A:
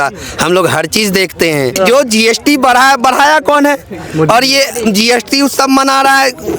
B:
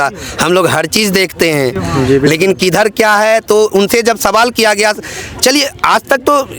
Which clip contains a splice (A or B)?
A